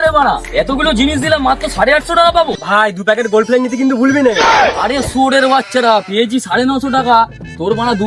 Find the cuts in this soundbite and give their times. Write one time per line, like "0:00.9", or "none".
0:02.5